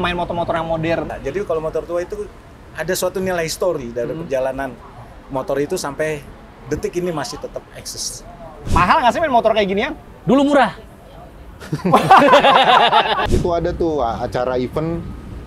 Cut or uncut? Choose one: cut